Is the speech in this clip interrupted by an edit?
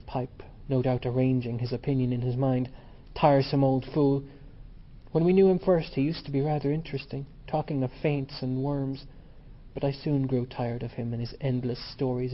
yes; 1 cut; at 2.6 s

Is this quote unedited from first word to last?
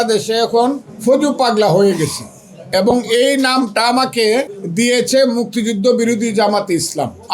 no; 2 cuts; at 0.9 s, 4.6 s

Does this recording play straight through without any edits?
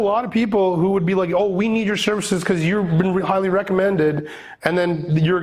yes; 0 cuts

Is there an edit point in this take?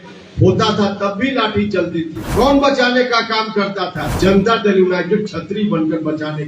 yes; 2 cuts; at 2.2 s, 4.0 s

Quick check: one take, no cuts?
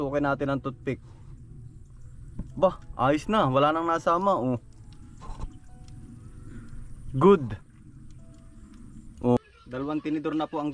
no; 1 cut; at 9.4 s

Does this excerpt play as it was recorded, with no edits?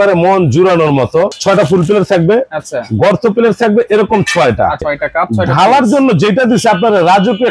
no; 2 cuts; at 1.3 s, 4.9 s

